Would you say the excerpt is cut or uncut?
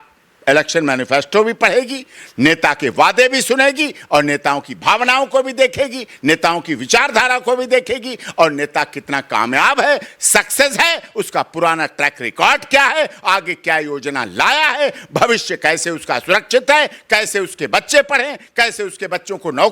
uncut